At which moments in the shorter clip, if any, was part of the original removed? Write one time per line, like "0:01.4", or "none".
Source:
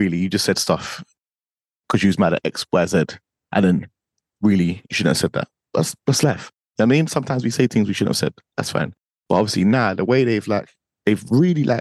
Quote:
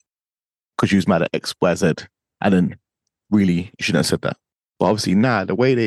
0:04.5